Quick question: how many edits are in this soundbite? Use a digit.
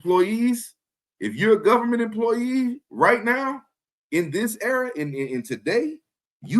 0